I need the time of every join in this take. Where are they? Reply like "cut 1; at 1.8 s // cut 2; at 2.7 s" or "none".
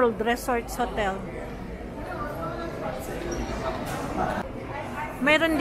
cut 1; at 4.4 s